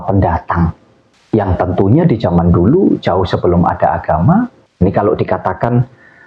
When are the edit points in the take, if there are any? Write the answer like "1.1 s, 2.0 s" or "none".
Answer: 4.6 s